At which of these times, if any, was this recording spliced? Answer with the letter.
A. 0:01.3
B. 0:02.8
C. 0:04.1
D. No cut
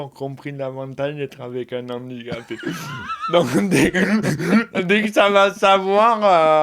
D